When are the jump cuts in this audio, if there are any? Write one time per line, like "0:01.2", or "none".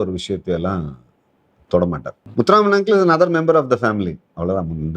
0:02.2